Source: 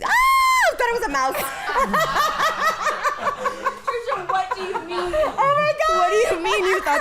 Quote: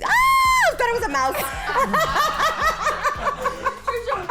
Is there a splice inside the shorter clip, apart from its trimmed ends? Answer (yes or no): no